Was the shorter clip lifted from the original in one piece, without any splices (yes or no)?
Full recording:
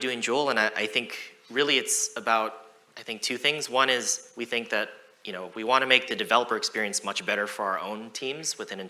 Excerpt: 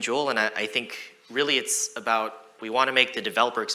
no